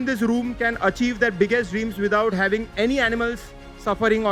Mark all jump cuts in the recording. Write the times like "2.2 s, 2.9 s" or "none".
none

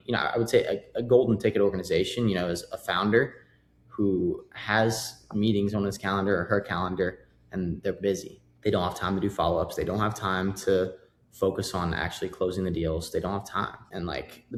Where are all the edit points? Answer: none

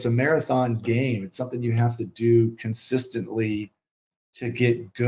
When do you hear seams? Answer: none

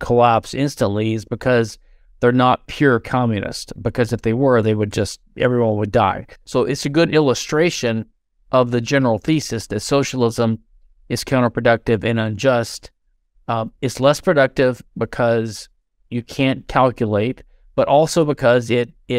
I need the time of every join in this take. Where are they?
6.3 s

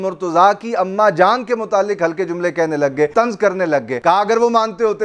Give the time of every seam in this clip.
3.1 s, 3.9 s

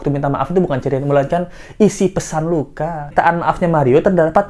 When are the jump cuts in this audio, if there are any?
3.1 s

